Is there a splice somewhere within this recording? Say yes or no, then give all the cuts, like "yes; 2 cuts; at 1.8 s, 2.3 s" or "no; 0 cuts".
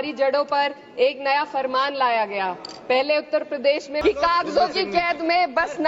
yes; 1 cut; at 4.0 s